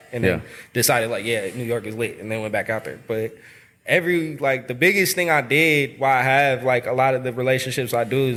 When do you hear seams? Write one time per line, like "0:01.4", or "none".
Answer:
none